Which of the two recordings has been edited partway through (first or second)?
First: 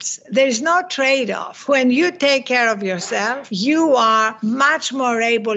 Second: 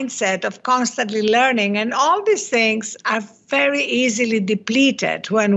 first